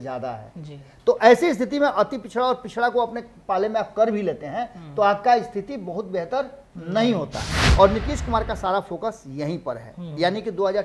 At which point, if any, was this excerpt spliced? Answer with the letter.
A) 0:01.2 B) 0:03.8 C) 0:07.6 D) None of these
C